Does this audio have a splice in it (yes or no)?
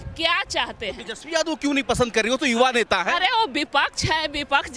no